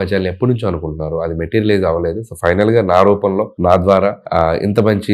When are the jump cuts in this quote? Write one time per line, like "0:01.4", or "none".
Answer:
0:03.5
0:04.2